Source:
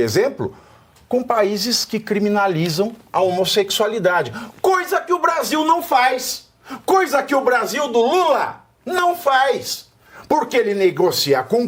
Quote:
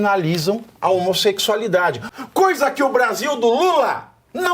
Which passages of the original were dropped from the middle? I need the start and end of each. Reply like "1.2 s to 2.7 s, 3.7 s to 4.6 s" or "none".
4.4 s to 6.6 s